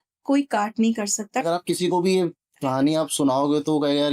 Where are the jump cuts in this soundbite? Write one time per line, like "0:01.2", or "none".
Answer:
0:01.4